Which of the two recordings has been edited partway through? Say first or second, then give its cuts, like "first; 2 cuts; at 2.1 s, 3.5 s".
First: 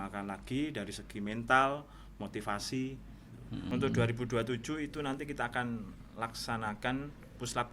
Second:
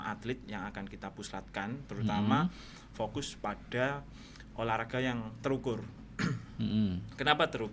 first; 1 cut; at 3.6 s